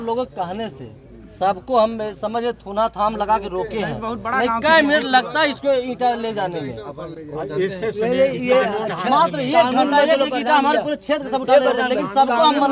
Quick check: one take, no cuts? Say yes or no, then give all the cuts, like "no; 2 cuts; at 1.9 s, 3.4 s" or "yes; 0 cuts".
yes; 0 cuts